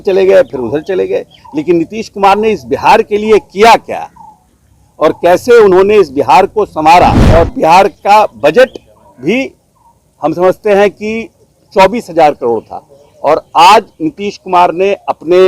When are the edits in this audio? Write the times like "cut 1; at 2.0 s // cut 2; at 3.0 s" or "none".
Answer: cut 1; at 7.2 s